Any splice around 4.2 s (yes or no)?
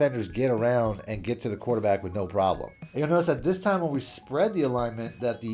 no